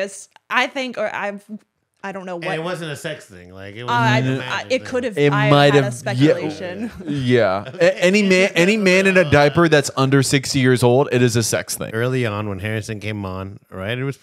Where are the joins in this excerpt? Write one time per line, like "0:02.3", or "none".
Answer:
0:11.9